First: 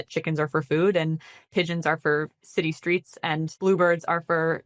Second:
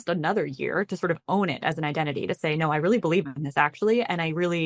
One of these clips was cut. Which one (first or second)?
first